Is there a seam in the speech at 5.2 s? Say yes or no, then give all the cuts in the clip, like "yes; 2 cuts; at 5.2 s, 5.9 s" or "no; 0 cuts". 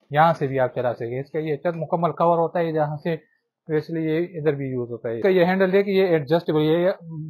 yes; 1 cut; at 5.2 s